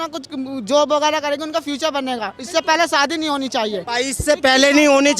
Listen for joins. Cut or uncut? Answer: cut